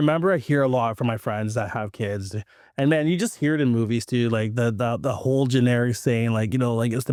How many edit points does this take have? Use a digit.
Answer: 0